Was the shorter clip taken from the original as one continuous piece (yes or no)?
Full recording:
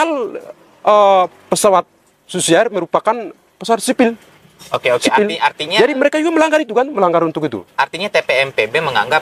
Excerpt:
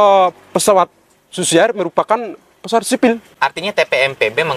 no